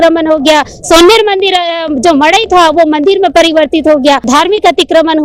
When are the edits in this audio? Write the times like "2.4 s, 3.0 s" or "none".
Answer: 4.3 s